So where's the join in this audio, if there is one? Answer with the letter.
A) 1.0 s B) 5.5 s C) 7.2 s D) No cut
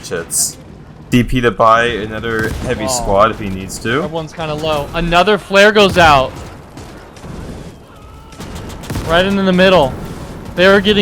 A